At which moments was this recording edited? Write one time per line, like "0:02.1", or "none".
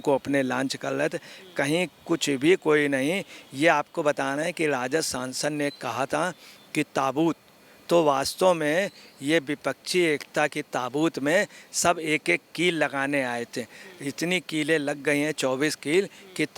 none